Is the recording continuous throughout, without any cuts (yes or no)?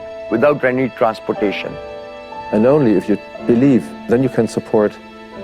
no